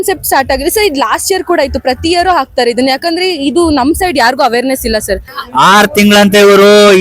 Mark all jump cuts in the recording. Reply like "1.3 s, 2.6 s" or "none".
5.3 s